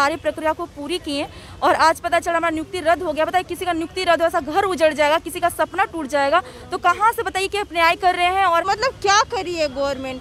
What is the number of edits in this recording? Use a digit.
1